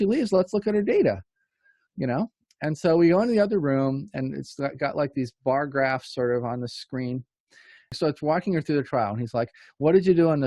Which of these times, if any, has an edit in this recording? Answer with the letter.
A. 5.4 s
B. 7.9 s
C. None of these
B